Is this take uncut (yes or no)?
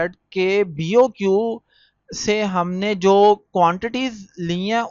yes